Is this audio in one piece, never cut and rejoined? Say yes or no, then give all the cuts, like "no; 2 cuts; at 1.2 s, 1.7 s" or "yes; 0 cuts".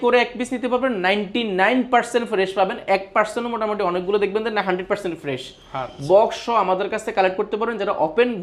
yes; 0 cuts